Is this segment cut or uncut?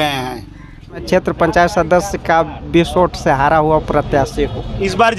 cut